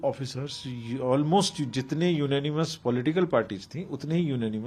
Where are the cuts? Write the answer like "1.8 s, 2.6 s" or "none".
none